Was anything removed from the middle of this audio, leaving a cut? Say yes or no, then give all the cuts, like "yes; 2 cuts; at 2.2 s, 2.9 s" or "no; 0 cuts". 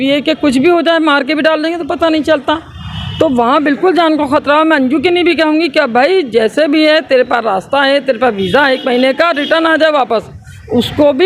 no; 0 cuts